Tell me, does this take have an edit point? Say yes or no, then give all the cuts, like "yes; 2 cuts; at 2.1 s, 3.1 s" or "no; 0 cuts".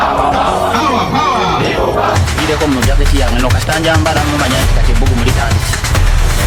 no; 0 cuts